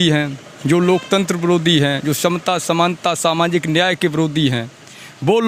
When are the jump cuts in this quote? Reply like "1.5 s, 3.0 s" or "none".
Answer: none

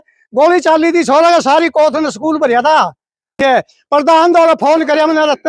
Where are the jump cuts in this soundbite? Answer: 3.4 s

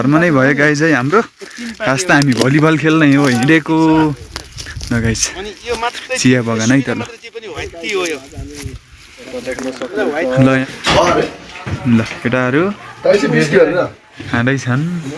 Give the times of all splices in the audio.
10.7 s

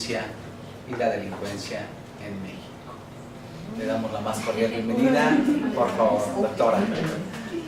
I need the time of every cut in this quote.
none

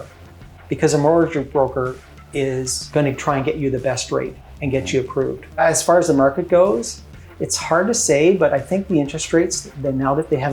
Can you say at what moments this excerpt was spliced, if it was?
2.9 s, 5.6 s

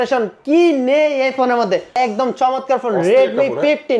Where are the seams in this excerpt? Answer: 1.9 s

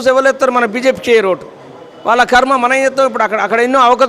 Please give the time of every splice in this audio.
none

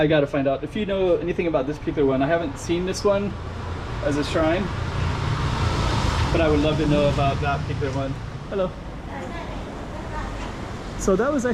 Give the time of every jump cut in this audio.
8.3 s

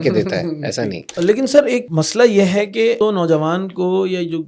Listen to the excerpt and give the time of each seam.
1.1 s, 1.9 s, 3.0 s

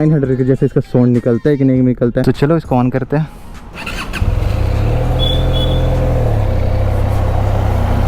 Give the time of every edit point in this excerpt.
2.2 s, 3.7 s

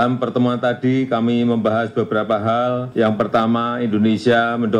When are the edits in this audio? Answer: 2.9 s

